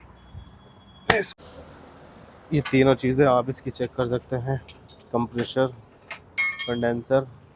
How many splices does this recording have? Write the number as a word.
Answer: one